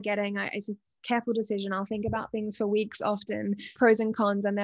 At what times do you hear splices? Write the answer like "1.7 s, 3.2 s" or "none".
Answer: 3.7 s